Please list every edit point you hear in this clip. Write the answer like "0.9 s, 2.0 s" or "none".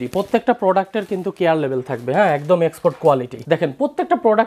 3.3 s